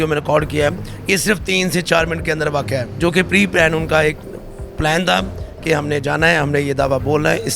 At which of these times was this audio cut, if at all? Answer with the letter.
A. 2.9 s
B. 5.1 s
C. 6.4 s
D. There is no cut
A